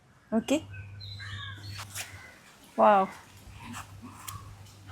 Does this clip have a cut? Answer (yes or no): yes